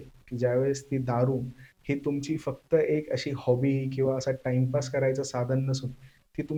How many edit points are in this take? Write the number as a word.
zero